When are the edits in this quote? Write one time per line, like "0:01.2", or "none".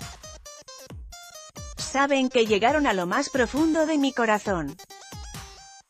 0:01.9
0:04.8